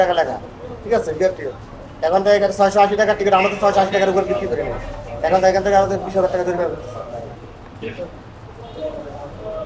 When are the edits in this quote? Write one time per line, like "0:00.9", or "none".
none